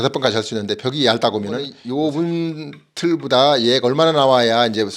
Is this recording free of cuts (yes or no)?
no